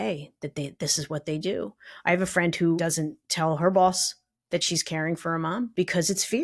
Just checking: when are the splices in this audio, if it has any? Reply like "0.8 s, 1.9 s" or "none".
2.8 s, 5.7 s